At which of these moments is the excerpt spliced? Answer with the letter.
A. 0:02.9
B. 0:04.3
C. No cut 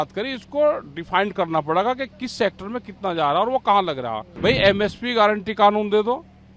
B